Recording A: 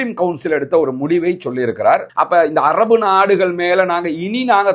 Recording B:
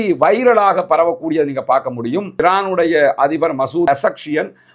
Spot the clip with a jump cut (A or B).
A